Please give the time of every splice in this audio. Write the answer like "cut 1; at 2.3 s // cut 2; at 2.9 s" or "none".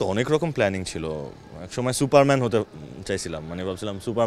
none